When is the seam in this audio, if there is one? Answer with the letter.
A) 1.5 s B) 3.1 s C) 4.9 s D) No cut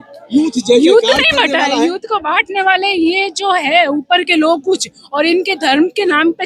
D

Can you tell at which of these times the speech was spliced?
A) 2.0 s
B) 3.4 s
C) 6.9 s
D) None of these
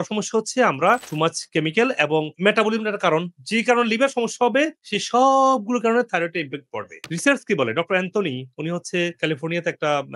D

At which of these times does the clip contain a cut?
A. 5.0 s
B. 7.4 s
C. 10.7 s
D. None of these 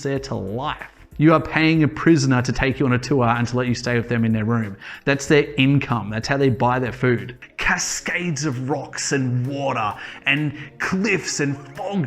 B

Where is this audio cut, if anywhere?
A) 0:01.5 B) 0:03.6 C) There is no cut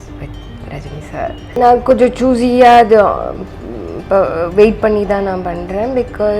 A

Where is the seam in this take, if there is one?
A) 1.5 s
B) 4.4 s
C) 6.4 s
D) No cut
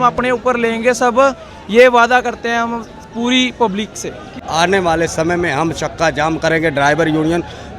B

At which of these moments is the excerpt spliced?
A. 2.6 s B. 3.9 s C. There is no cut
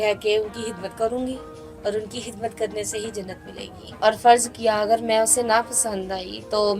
B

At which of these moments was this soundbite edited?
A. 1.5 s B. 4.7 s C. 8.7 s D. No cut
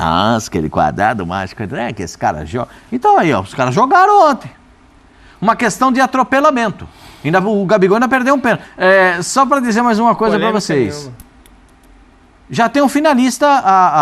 C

